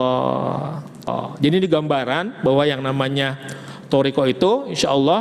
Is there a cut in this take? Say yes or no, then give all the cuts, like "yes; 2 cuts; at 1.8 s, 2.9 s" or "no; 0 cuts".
yes; 1 cut; at 1.1 s